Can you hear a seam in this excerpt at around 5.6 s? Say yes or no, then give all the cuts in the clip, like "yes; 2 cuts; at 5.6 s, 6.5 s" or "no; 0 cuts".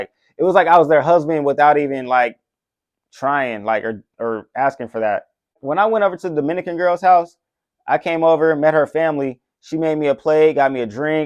yes; 1 cut; at 5.6 s